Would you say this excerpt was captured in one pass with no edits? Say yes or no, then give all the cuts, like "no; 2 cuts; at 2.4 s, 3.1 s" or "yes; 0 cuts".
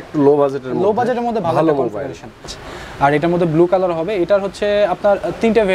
no; 1 cut; at 2.6 s